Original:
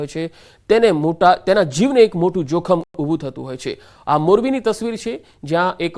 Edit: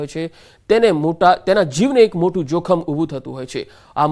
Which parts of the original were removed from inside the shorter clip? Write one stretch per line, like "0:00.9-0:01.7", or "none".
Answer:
0:02.8-0:02.9